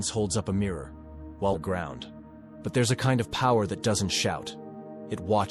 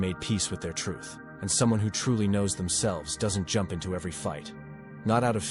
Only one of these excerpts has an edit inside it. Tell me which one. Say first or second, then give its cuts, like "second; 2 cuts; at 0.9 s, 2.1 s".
first; 1 cut; at 1.5 s